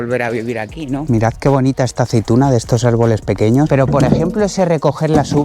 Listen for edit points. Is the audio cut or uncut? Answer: cut